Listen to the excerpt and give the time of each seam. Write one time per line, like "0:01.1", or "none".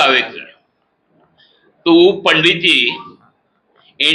none